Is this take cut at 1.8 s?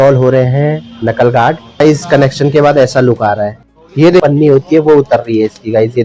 yes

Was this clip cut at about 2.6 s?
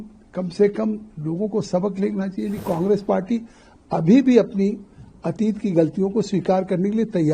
yes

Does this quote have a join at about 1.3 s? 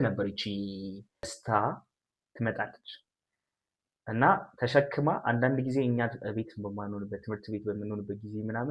yes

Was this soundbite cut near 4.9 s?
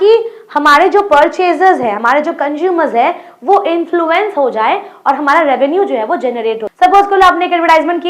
no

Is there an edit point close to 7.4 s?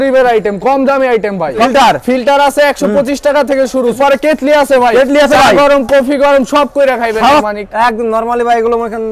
yes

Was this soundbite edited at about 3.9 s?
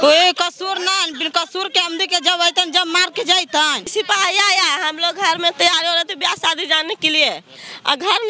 yes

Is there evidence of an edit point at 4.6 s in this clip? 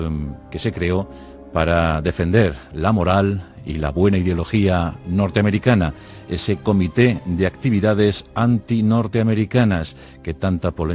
yes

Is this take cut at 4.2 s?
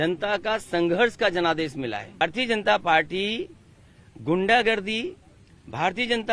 no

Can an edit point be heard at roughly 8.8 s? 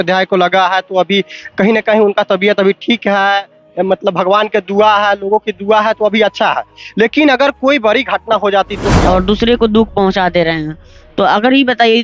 yes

